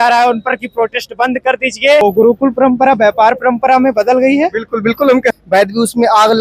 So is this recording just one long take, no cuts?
no; 2 cuts; at 2.0 s, 5.4 s

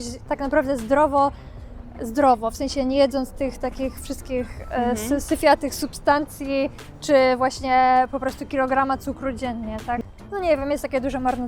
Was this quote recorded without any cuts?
no; 1 cut; at 10.0 s

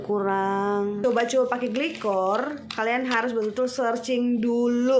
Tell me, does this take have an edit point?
yes; 1 cut; at 1.0 s

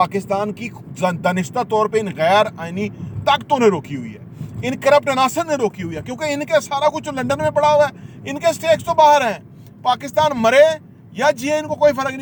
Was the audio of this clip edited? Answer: no; 0 cuts

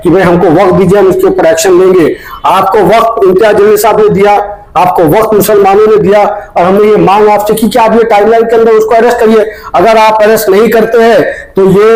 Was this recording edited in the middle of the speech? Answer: no; 0 cuts

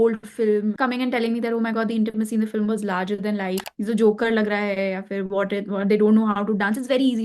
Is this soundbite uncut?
no; 2 cuts; at 0.8 s, 3.6 s

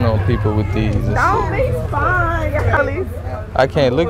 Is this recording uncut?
no; 1 cut; at 2.8 s

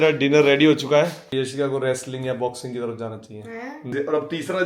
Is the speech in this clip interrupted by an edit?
yes; 2 cuts; at 1.3 s, 3.9 s

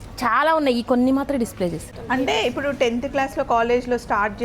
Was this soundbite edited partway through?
yes; 1 cut; at 1.9 s

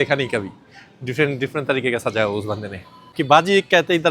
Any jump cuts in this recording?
yes; 1 cut; at 3.2 s

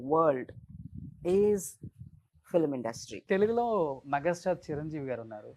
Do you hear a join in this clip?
yes; 1 cut; at 3.1 s

